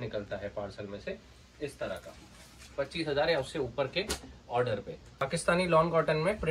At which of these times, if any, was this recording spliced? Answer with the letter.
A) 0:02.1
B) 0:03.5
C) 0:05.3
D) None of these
C